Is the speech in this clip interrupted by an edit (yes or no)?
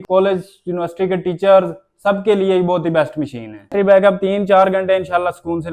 yes